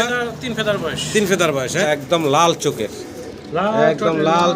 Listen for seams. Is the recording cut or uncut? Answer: cut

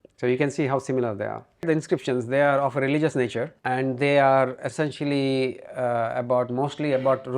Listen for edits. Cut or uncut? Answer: cut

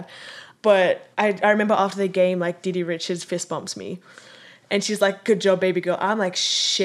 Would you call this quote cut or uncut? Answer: uncut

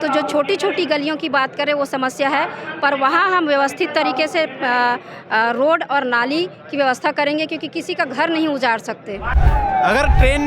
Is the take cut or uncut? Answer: cut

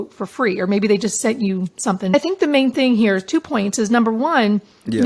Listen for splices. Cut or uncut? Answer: cut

